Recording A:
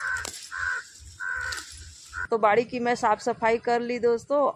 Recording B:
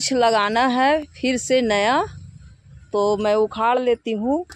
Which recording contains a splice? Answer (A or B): A